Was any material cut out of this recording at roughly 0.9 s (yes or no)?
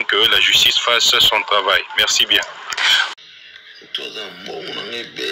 no